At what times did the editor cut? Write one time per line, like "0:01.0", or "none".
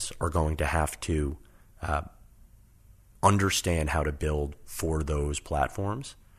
none